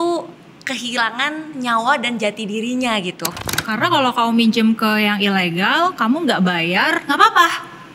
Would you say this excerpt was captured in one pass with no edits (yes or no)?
no